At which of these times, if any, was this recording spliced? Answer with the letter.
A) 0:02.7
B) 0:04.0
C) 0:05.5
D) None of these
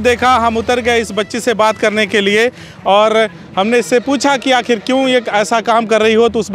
D